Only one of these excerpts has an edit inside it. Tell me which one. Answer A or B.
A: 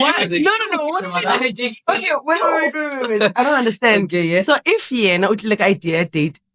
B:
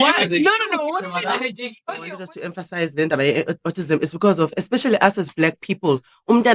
B